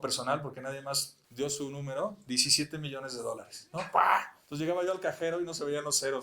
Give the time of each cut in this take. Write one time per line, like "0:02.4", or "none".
0:01.2
0:04.4